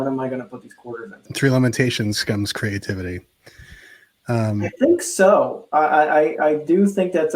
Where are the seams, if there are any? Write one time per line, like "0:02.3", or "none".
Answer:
0:01.2